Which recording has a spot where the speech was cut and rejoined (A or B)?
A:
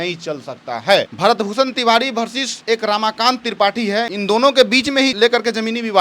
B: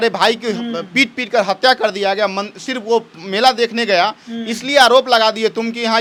A